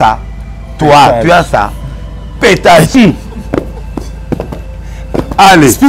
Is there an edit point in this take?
yes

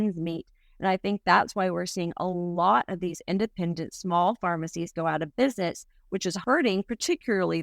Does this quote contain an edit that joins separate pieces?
yes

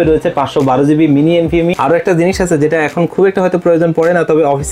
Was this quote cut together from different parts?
yes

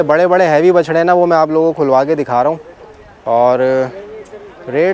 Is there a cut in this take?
no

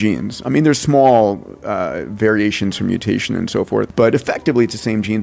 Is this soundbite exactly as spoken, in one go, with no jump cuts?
no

